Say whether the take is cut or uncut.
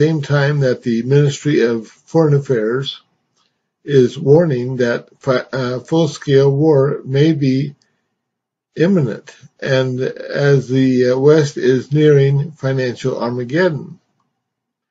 cut